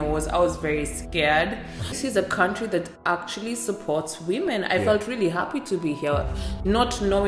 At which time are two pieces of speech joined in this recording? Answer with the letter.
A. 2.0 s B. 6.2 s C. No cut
A